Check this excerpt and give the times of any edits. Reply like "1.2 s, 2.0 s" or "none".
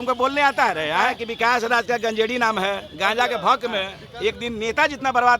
1.2 s, 4.0 s